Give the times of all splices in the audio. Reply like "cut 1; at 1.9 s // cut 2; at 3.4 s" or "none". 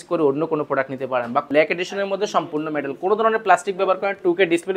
cut 1; at 1.5 s